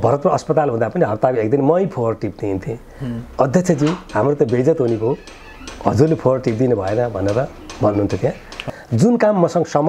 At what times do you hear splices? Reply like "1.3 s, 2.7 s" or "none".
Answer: 8.6 s